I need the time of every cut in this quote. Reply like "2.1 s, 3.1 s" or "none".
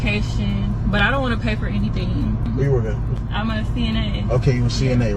none

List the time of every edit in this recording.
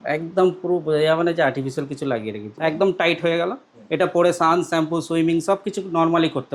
2.4 s

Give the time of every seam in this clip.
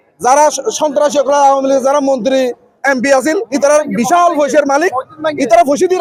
none

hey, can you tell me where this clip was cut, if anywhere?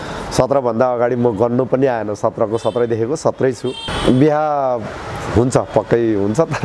3.9 s

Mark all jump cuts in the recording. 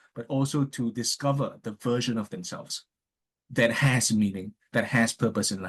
none

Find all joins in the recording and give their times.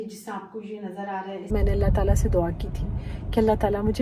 1.5 s

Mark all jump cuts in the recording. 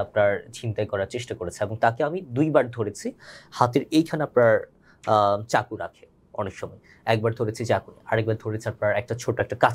none

